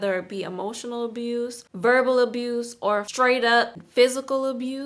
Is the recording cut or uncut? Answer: cut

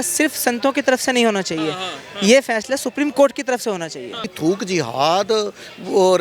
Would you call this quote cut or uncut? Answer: cut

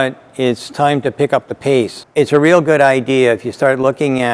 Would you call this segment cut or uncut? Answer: cut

